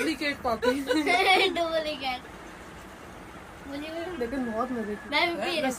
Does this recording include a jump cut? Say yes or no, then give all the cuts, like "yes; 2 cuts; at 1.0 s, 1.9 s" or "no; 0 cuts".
no; 0 cuts